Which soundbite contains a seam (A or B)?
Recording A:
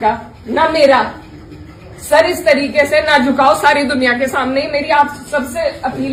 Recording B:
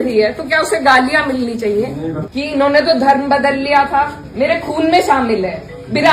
B